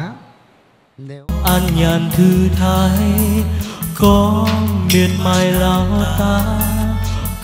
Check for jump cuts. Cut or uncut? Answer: cut